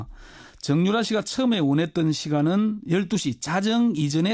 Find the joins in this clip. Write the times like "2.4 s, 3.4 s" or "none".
1.3 s